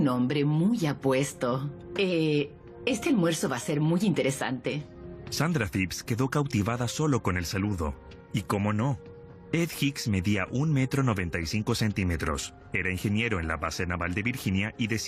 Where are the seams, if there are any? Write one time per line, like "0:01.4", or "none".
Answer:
0:09.5